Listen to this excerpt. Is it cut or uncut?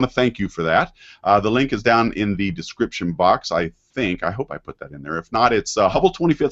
cut